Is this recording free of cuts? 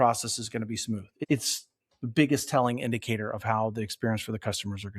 no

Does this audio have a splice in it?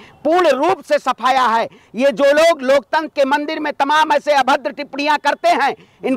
no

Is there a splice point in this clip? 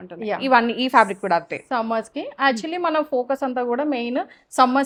no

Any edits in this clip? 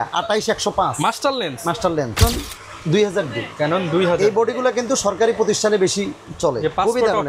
yes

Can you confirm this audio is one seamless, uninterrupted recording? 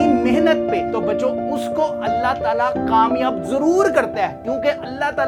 yes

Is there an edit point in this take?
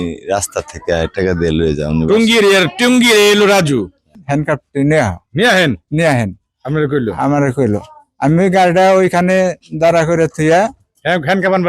yes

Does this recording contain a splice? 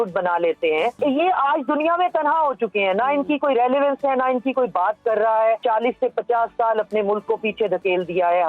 yes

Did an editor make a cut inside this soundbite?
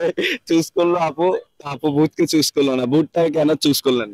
no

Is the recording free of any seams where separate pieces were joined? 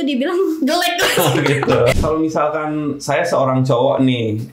no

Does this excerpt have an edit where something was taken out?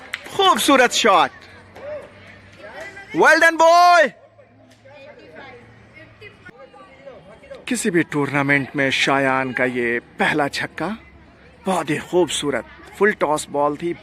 yes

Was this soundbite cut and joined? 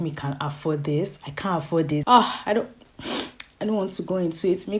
yes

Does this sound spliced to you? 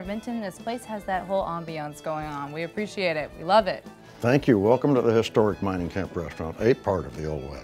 no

